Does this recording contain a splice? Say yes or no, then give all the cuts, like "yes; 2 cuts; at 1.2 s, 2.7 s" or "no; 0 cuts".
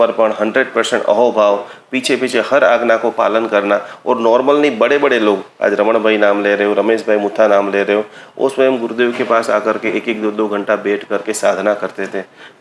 no; 0 cuts